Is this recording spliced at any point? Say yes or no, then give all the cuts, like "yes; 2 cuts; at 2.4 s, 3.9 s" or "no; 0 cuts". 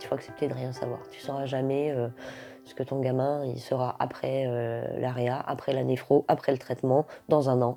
no; 0 cuts